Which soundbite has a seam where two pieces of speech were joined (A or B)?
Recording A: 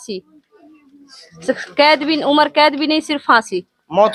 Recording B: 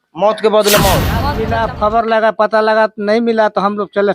B